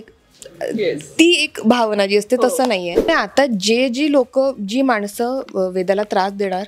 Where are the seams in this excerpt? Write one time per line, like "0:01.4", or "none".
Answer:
0:03.1